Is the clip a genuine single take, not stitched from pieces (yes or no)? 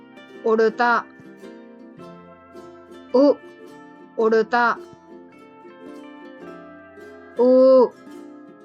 no